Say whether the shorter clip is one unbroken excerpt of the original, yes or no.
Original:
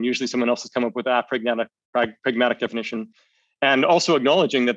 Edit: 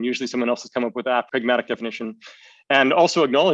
no